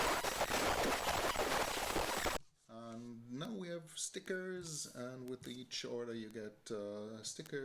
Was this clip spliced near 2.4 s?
yes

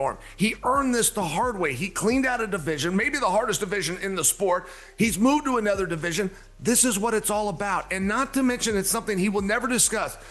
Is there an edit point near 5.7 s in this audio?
no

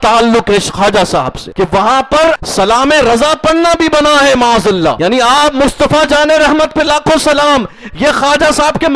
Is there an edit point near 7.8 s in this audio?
no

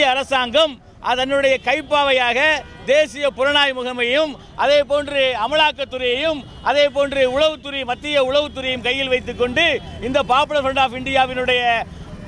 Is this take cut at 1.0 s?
no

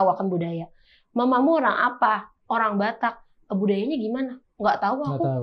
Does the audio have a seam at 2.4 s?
no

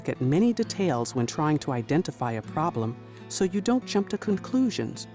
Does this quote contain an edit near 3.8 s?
no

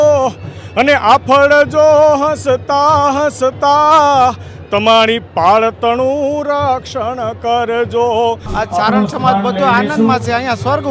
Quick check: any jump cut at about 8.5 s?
yes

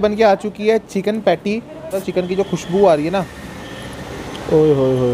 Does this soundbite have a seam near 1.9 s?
yes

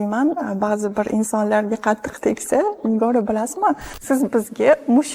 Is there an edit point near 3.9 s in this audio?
yes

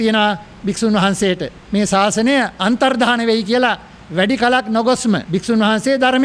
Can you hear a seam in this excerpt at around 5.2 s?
yes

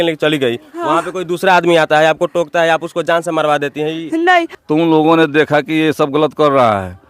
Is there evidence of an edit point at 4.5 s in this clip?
yes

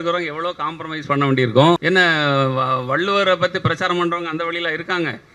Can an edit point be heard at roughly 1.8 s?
yes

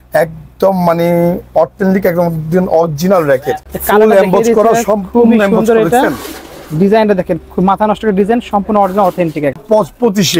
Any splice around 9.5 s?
yes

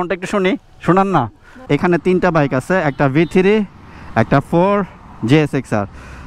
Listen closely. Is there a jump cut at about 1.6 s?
yes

